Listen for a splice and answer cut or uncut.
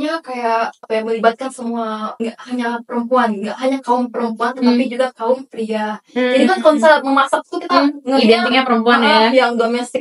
cut